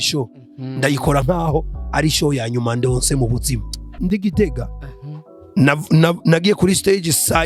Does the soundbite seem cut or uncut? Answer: cut